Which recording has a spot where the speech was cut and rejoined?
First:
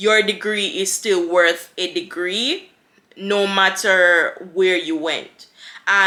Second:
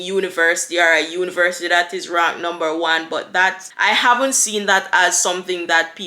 second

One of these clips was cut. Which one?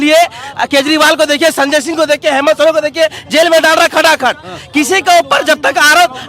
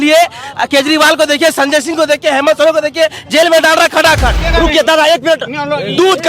second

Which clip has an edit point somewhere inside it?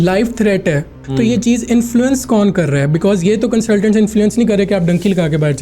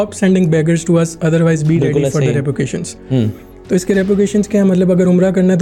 first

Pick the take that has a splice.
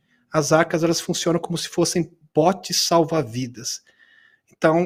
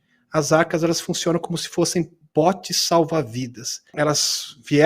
second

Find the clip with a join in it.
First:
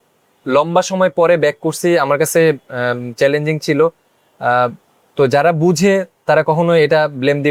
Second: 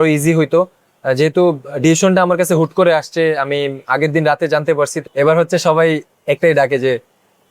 second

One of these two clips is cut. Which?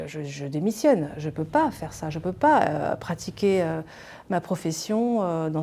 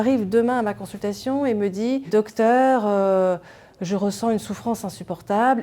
second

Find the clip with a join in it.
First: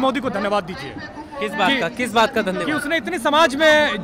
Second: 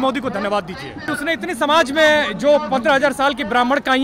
second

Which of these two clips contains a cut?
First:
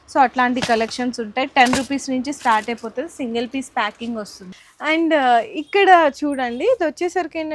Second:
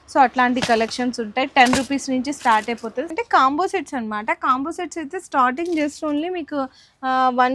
second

